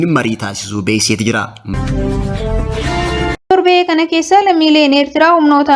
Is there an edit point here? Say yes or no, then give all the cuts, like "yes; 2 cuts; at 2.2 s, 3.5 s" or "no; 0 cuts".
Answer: yes; 2 cuts; at 1.6 s, 3.5 s